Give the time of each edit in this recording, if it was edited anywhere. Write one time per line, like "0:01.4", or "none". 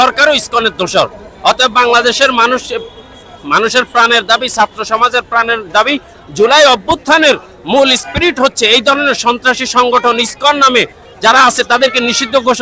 none

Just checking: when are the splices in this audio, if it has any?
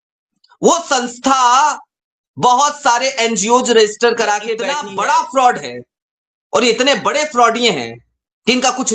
0:04.7

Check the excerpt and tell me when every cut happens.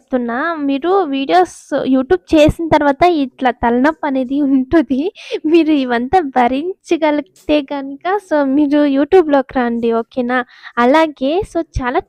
none

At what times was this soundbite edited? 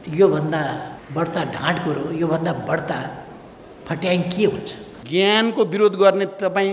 0:01.0
0:05.0

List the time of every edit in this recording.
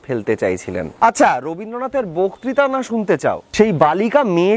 0:00.9
0:03.4

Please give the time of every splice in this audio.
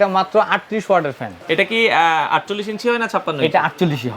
0:01.3

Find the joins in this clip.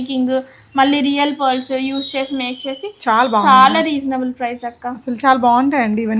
none

